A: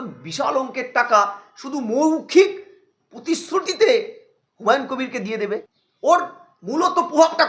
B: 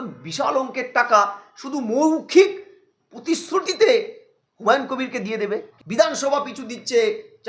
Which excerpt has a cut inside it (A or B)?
B